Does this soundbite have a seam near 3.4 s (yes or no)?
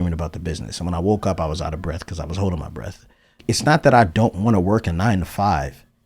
yes